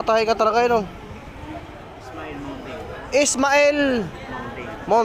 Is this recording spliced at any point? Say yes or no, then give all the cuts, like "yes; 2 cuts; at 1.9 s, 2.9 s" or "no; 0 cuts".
yes; 1 cut; at 2.0 s